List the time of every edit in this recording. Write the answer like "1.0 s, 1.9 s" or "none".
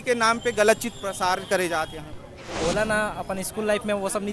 2.5 s